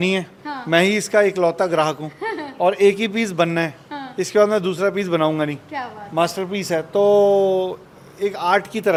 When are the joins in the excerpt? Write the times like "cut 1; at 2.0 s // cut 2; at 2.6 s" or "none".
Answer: none

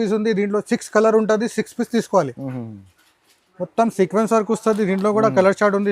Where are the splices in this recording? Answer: cut 1; at 2.3 s

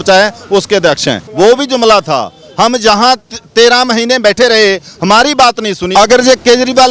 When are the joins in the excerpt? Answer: cut 1; at 1.2 s // cut 2; at 5.8 s

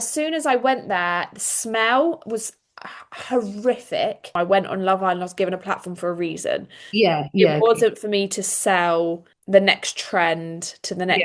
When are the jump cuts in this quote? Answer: cut 1; at 4.3 s

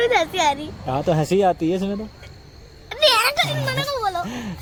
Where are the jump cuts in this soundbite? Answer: none

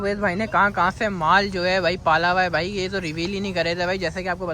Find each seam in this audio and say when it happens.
none

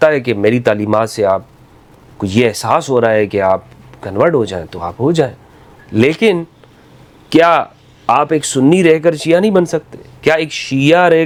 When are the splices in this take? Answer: none

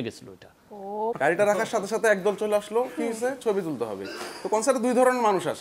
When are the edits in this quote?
cut 1; at 1.1 s

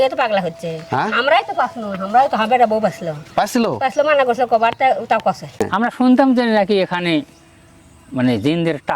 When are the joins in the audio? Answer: cut 1; at 5.6 s

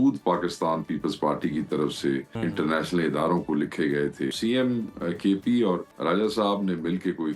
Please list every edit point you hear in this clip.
cut 1; at 2.3 s // cut 2; at 4.4 s // cut 3; at 5.9 s

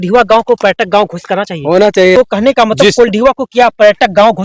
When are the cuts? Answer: cut 1; at 2.2 s

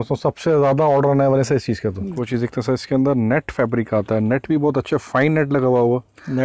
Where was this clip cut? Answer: cut 1; at 2.1 s

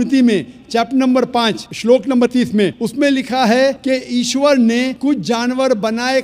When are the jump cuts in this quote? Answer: cut 1; at 1.7 s // cut 2; at 2.8 s // cut 3; at 3.8 s // cut 4; at 4.9 s

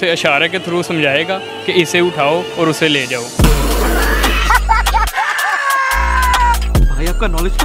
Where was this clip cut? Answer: none

